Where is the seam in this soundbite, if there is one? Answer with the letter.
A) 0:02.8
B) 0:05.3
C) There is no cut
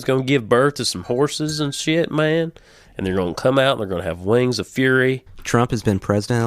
B